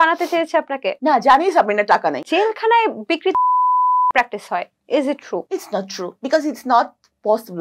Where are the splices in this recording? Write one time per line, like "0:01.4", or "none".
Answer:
0:00.9
0:02.2
0:06.0